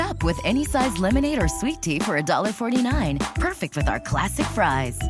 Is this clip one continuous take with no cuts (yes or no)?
yes